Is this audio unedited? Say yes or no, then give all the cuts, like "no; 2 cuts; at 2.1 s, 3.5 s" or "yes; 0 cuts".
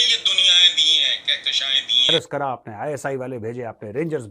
no; 1 cut; at 2.0 s